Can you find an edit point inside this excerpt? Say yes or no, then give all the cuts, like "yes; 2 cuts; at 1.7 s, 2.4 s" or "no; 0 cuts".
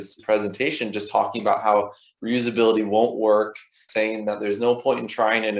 yes; 1 cut; at 3.9 s